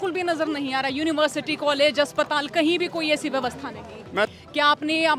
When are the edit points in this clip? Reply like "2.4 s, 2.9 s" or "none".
4.3 s

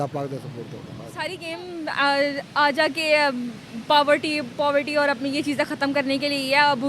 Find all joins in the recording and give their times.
1.3 s

